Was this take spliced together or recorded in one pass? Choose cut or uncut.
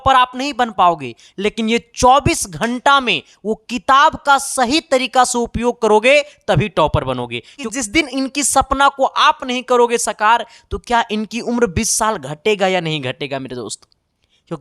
cut